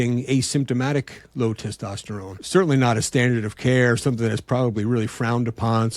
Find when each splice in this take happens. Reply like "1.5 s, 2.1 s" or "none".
2.3 s

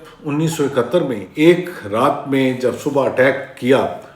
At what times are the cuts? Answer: 1.2 s

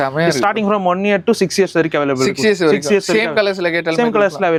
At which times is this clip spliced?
none

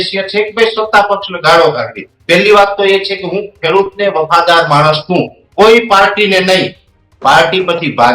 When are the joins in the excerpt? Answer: 2.1 s

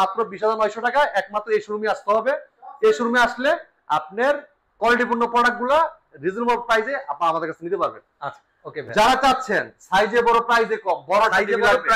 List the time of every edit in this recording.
none

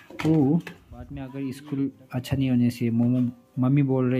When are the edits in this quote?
1.2 s

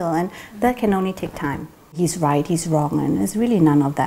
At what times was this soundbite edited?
2.0 s

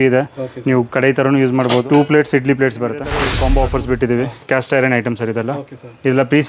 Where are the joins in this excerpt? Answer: 1.8 s, 3.3 s

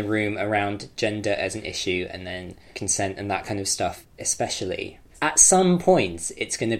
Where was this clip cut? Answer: 2.7 s, 4.1 s, 5.0 s

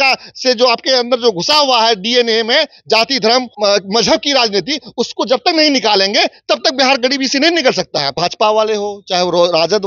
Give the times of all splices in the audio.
3.5 s, 8.2 s

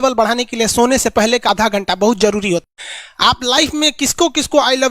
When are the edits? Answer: 1.4 s, 2.6 s

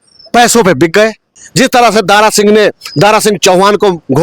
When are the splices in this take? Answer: 1.4 s

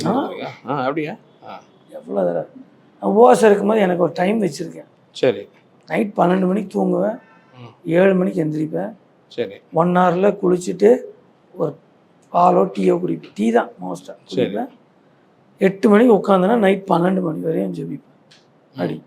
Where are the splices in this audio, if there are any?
none

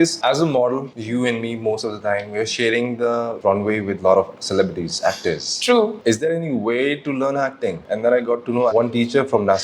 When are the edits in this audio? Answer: 6.0 s, 8.7 s

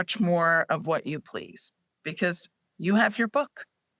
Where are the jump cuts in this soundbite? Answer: none

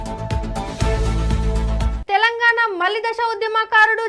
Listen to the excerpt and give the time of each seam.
1.7 s

